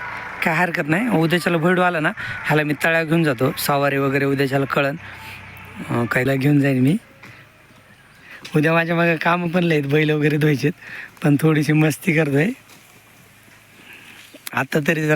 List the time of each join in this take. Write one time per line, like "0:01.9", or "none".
0:06.3